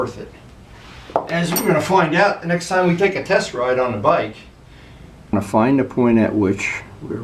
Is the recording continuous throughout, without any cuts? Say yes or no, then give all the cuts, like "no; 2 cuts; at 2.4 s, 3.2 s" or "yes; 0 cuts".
no; 1 cut; at 5.3 s